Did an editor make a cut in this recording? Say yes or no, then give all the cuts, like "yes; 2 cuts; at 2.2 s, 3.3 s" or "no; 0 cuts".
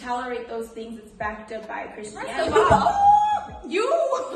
yes; 1 cut; at 2.3 s